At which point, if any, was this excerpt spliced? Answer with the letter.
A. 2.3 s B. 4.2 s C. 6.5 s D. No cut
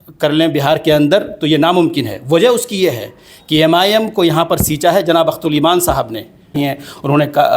C